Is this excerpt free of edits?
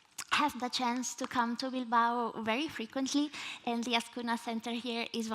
no; 1 cut; at 4.1 s

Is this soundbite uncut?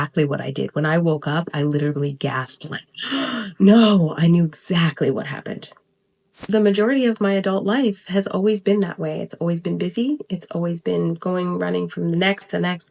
no; 1 cut; at 6.3 s

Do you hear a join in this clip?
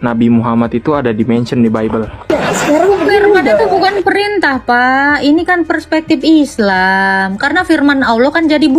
yes; 1 cut; at 2.3 s

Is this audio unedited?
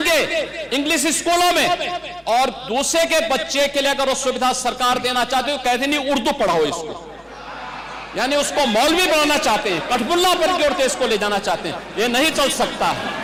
yes; 0 cuts

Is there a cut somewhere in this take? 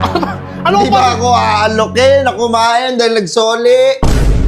no; 0 cuts

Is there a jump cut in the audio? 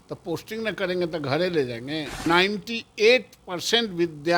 yes; 1 cut; at 2.3 s

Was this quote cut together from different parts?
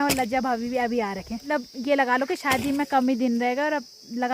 yes; 1 cut; at 1.4 s

